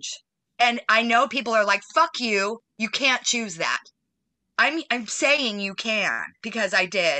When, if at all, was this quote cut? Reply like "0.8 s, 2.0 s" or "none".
none